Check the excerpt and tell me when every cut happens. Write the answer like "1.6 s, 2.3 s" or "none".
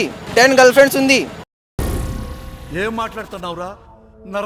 none